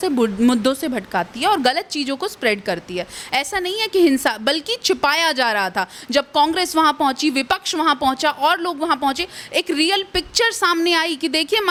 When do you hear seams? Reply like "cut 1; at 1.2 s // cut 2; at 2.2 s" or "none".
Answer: none